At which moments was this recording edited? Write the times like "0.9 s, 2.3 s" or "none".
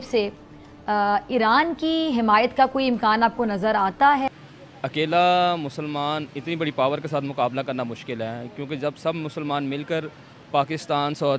4.3 s